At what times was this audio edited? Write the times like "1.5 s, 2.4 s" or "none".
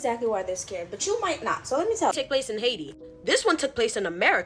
2.1 s